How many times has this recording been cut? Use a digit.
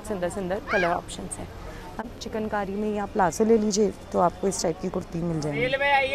1